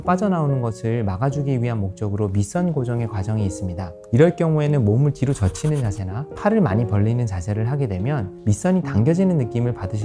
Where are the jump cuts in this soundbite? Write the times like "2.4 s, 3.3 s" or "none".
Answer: 4.0 s

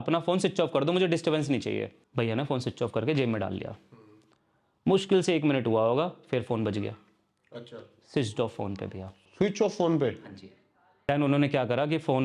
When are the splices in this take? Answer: 2.0 s, 11.1 s

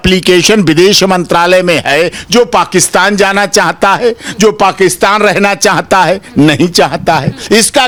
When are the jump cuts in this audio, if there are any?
none

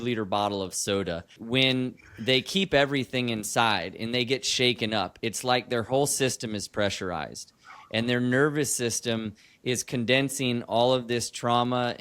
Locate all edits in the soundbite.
1.4 s

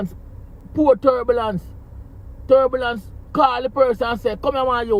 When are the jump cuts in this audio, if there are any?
none

